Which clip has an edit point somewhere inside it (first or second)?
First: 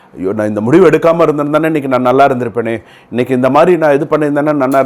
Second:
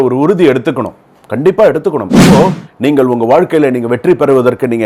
second